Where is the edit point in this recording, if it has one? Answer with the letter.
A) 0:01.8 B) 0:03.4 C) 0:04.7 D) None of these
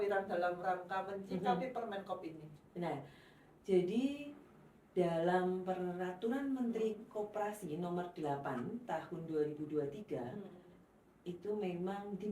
D